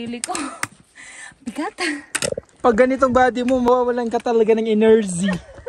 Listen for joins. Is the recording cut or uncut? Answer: cut